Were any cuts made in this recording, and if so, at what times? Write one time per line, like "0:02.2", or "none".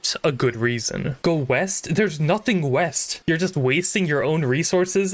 0:01.1
0:03.2